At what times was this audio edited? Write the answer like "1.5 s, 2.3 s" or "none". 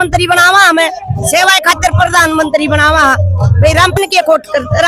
none